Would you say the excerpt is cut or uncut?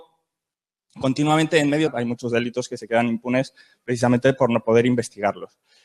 uncut